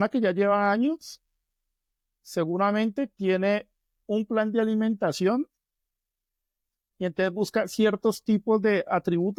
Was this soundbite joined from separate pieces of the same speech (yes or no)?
no